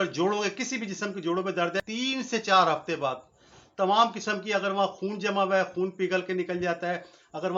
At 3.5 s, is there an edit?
no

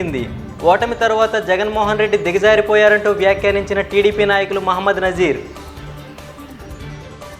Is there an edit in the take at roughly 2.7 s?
no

